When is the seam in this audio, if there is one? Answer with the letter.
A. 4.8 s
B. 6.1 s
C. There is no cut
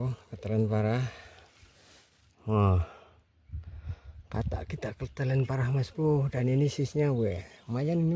C